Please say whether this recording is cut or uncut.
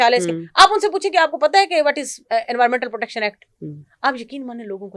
uncut